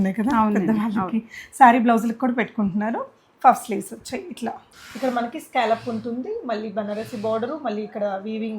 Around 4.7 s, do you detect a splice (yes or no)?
yes